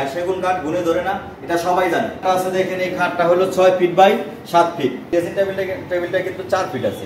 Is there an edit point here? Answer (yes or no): yes